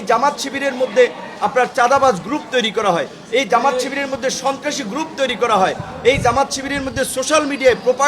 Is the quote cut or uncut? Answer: uncut